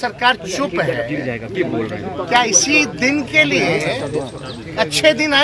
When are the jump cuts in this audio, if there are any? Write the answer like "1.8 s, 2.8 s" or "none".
1.5 s